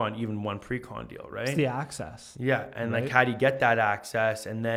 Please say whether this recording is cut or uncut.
uncut